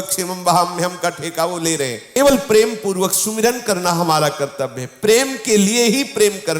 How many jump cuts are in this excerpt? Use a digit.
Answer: 1